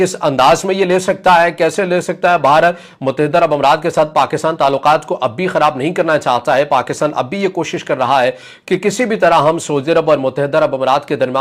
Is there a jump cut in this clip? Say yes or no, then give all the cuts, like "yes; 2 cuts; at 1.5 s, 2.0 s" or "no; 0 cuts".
no; 0 cuts